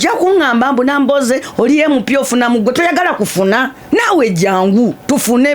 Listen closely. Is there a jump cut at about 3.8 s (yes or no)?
yes